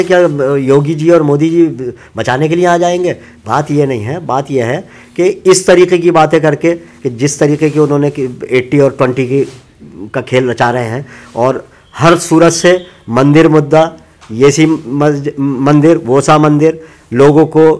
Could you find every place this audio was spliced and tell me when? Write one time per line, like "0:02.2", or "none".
none